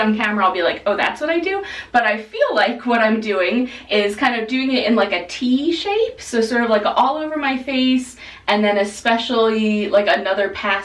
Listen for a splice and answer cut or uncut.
uncut